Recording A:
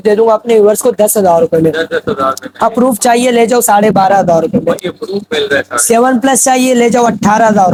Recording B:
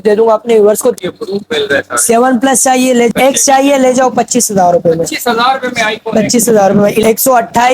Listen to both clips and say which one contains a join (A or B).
B